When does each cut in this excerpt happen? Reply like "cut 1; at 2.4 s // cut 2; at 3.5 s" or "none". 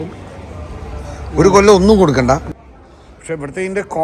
cut 1; at 2.4 s